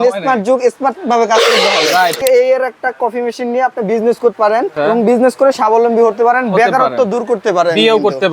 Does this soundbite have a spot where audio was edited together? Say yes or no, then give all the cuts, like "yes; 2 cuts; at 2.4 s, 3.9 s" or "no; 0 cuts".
yes; 2 cuts; at 2.2 s, 4.3 s